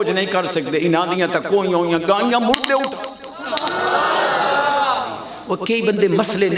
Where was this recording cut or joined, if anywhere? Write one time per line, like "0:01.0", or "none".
0:05.3